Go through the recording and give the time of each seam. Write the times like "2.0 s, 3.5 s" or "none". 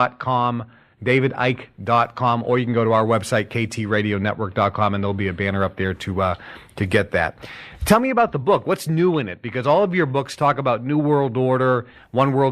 7.1 s